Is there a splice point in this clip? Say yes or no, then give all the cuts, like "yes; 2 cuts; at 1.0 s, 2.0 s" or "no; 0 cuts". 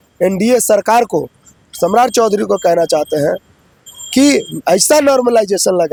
no; 0 cuts